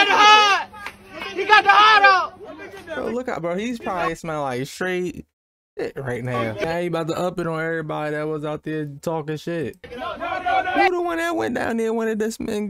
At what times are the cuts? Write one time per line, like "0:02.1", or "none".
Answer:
0:06.6